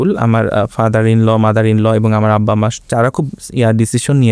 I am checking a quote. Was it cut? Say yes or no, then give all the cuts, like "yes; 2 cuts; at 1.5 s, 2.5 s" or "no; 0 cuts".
no; 0 cuts